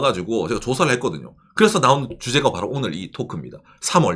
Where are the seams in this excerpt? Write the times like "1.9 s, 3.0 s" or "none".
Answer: none